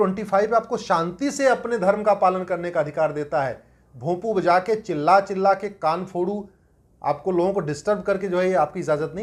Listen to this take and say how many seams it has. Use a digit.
0